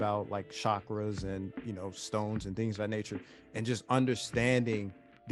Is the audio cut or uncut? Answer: uncut